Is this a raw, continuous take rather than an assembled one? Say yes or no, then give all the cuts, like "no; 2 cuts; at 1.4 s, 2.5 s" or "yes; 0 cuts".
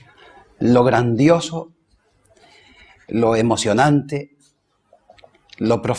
yes; 0 cuts